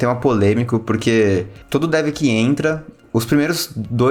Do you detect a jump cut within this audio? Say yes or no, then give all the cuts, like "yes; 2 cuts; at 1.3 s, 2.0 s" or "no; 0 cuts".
yes; 2 cuts; at 1.6 s, 3.0 s